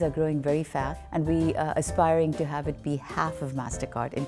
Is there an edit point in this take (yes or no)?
yes